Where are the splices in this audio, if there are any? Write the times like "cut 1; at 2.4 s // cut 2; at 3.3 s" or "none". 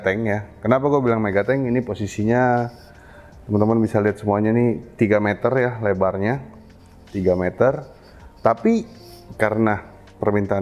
none